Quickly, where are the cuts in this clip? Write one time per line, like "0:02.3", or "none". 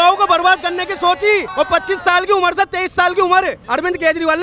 0:01.5
0:03.6